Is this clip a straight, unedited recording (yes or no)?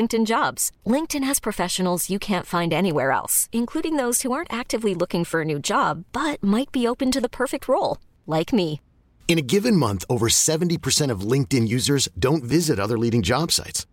yes